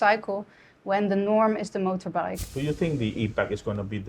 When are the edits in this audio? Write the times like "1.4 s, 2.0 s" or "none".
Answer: 2.4 s